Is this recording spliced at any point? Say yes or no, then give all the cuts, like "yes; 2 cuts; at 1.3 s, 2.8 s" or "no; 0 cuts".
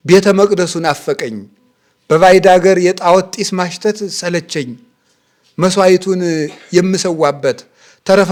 no; 0 cuts